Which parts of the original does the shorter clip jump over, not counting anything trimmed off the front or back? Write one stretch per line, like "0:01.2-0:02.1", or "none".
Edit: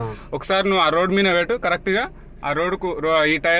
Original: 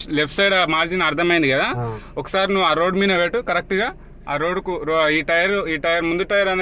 none